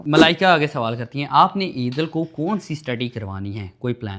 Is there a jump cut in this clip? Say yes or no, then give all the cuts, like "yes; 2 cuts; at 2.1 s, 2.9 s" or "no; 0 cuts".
no; 0 cuts